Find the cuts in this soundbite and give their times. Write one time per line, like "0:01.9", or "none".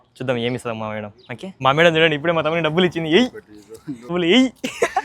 0:01.4
0:04.1

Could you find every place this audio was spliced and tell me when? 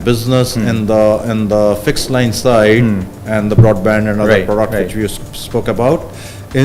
none

